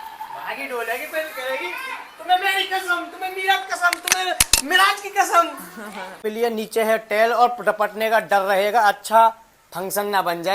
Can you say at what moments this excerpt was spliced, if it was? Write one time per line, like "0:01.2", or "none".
0:06.2